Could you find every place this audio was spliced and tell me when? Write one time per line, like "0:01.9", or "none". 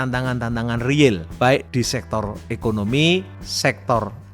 0:01.5
0:03.4